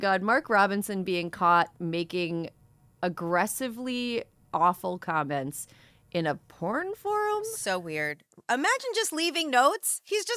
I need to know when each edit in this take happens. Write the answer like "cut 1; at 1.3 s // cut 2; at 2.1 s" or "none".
none